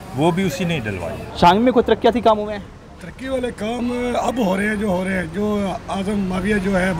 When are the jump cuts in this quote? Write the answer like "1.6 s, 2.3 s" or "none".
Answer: 1.2 s

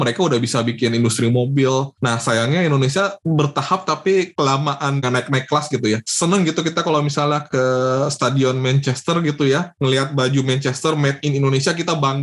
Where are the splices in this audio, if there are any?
1.9 s, 5.0 s, 6.1 s

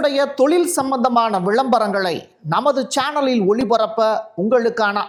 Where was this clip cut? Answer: none

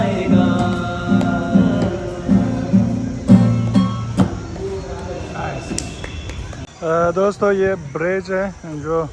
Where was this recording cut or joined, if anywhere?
6.7 s

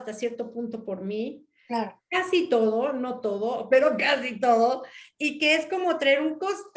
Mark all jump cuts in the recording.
none

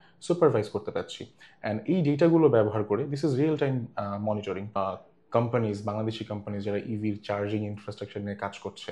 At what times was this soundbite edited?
4.7 s

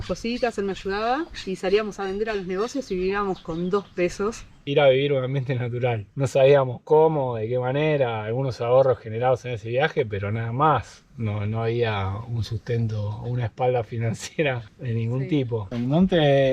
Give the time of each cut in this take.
4.6 s, 15.6 s

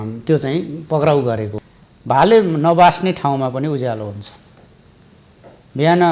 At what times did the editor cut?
1.5 s

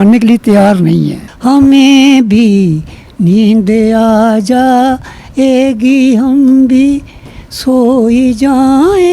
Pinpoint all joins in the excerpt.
1.2 s

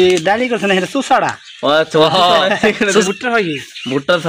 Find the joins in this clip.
3.0 s

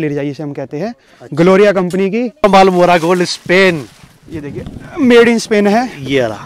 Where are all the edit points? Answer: 2.4 s

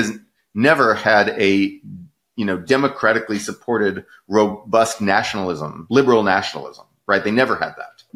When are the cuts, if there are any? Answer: 5.7 s

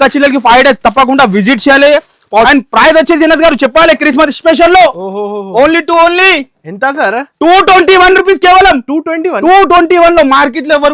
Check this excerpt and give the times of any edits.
2.5 s

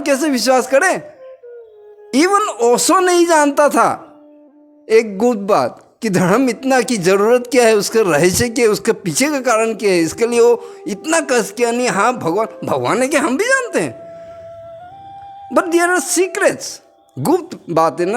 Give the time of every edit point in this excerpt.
none

